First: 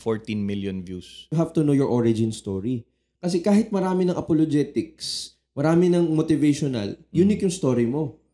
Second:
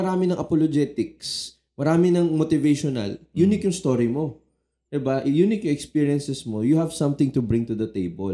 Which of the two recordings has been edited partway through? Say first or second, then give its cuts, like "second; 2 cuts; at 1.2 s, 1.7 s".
first; 1 cut; at 1.3 s